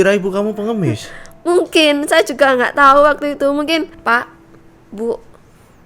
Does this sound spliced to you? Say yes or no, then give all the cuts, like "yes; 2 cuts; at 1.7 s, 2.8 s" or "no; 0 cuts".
yes; 1 cut; at 4.0 s